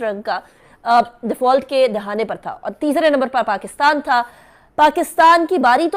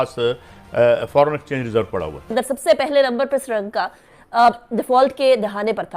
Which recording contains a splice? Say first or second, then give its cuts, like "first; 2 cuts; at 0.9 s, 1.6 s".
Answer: second; 1 cut; at 2.2 s